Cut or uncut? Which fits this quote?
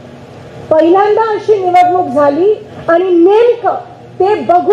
cut